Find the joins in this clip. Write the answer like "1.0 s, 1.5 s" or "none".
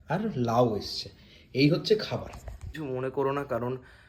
2.6 s